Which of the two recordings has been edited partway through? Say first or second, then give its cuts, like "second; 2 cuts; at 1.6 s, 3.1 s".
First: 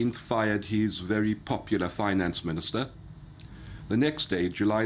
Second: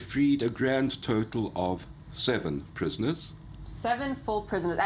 first; 1 cut; at 1.5 s